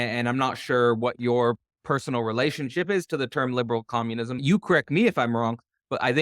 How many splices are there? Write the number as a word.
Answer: one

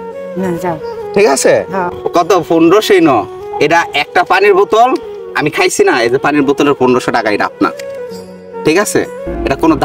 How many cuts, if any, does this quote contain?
two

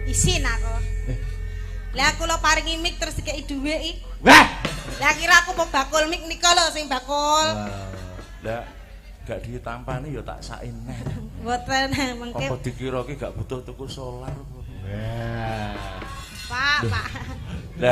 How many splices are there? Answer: one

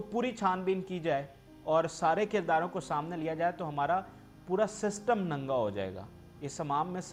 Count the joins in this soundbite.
zero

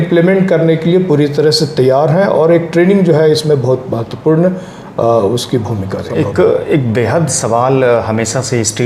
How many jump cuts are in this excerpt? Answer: one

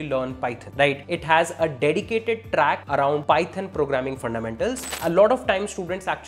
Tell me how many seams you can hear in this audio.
three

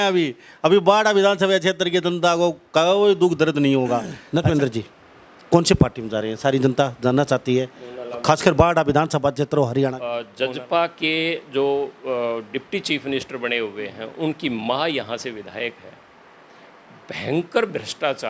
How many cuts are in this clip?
two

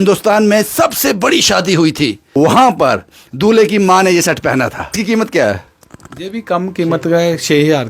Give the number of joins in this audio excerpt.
two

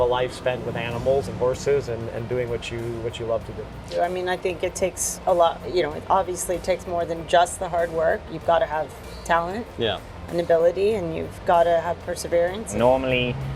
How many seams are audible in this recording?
two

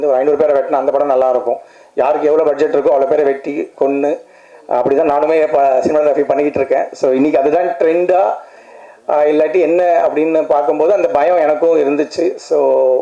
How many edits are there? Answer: zero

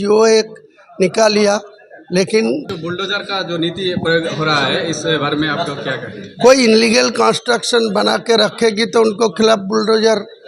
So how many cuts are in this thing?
one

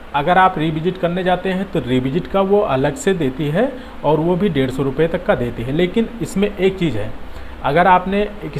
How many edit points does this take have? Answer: zero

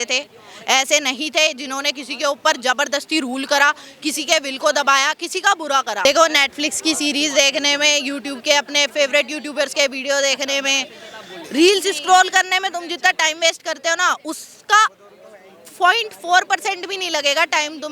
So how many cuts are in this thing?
one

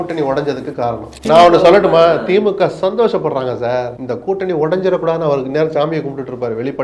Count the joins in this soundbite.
two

